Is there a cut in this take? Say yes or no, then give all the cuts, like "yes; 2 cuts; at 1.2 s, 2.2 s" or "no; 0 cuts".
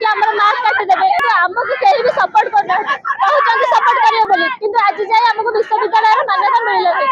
yes; 1 cut; at 1.2 s